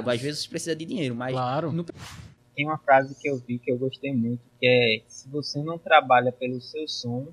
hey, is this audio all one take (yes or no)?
no